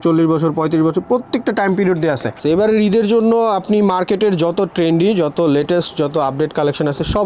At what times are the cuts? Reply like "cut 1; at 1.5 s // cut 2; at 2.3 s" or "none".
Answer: cut 1; at 2.4 s